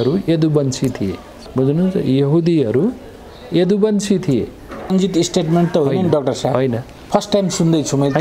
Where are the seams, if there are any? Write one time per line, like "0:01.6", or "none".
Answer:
0:01.4
0:04.9

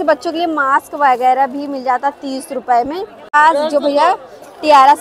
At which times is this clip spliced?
0:03.3

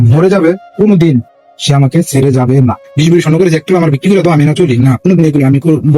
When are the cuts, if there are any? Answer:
0:02.8

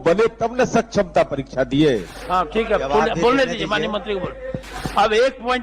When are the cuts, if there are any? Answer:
0:02.5

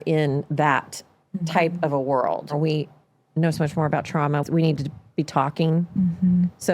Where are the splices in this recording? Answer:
0:02.5
0:04.4

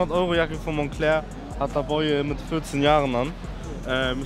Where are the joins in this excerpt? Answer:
none

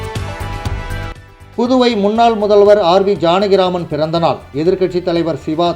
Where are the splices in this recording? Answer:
0:01.3

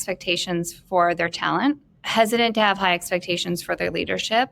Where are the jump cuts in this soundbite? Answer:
0:01.9

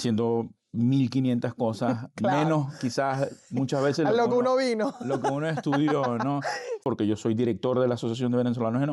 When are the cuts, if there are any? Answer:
0:06.8

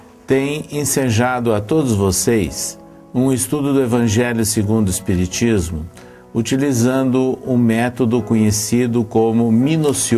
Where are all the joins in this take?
0:04.1

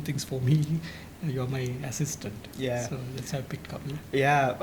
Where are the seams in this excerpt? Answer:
none

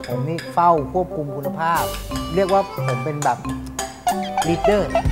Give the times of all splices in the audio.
none

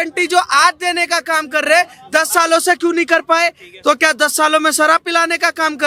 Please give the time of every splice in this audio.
none

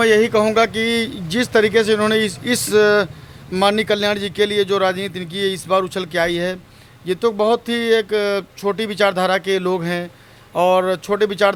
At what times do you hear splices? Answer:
none

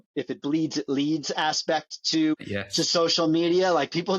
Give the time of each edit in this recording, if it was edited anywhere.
0:02.3

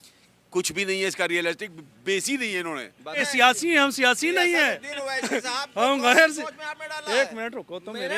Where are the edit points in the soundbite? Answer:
0:03.2

